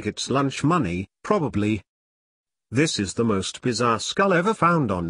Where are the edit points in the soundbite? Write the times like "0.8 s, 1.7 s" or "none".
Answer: 3.9 s